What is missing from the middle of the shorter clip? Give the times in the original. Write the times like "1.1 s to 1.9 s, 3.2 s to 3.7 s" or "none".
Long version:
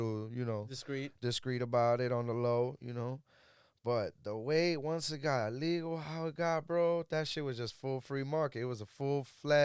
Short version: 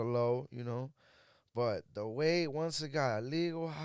none